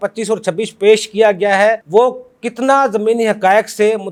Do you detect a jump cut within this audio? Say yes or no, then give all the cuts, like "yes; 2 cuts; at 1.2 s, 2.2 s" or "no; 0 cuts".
no; 0 cuts